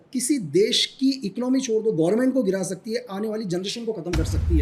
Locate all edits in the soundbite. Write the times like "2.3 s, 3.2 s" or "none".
none